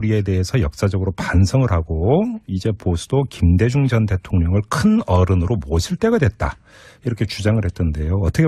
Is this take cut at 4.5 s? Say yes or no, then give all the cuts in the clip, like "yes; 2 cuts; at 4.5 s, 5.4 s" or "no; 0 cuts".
no; 1 cut; at 1.4 s